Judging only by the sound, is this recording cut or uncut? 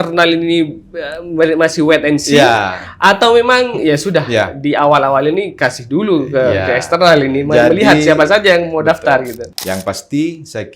cut